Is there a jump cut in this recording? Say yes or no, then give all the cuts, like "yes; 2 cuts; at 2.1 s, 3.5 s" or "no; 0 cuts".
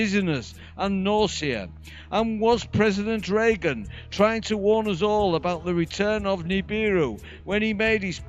no; 0 cuts